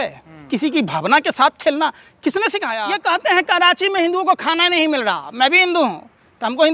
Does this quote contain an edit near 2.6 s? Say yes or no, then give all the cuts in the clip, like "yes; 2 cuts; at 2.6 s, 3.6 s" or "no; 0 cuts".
yes; 1 cut; at 2.6 s